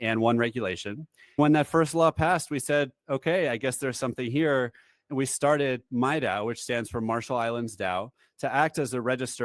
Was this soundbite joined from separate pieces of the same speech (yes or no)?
no